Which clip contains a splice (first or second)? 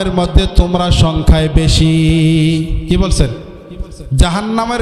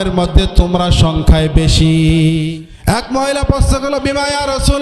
second